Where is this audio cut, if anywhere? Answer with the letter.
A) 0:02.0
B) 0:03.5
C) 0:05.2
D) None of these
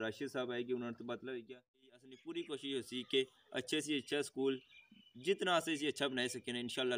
A